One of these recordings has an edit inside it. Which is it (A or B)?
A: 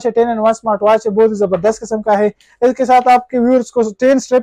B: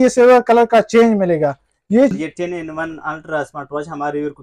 B